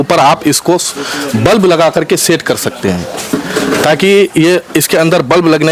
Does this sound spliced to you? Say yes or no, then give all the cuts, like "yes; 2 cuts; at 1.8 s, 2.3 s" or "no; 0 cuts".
no; 0 cuts